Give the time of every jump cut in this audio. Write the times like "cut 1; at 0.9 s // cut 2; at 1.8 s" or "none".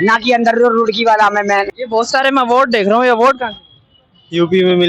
cut 1; at 1.8 s

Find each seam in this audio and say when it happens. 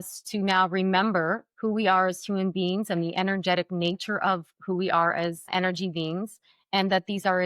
cut 1; at 5.5 s

